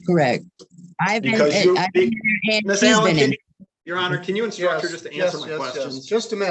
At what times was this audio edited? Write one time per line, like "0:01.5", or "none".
none